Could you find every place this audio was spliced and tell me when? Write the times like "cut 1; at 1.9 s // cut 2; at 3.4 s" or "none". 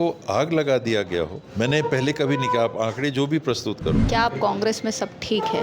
cut 1; at 1.4 s // cut 2; at 4.0 s